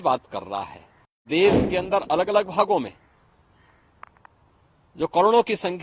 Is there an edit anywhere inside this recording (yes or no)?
yes